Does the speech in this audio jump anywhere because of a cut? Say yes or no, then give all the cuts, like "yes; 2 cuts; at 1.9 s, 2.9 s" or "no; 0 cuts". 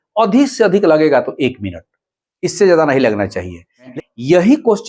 yes; 1 cut; at 3.9 s